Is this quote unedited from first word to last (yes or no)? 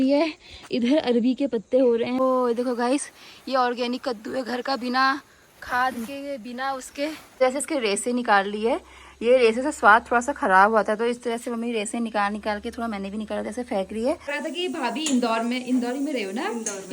no